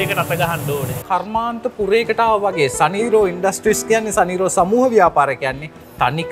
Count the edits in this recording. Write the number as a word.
one